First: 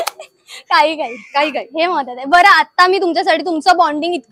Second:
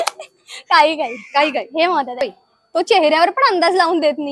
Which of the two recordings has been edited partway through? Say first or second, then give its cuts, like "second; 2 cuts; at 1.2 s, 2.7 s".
second; 1 cut; at 2.2 s